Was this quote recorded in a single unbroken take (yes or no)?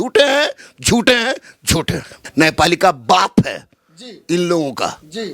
no